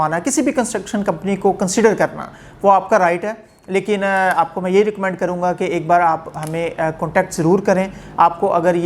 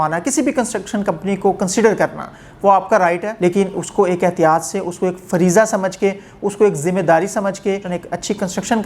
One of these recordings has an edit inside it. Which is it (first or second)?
second